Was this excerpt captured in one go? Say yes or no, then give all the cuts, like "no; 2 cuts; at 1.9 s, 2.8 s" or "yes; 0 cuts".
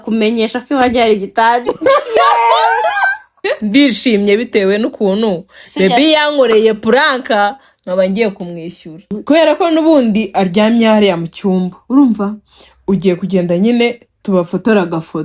no; 2 cuts; at 3.4 s, 9.1 s